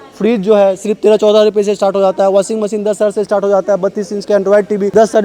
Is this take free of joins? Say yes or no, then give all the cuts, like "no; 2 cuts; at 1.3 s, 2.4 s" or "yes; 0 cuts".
yes; 0 cuts